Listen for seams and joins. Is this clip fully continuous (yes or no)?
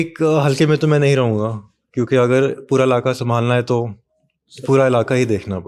yes